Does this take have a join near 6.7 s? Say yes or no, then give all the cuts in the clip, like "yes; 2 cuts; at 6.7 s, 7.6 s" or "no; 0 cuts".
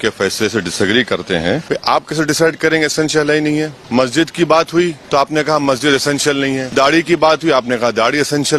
yes; 4 cuts; at 1.6 s, 3.8 s, 5.0 s, 6.7 s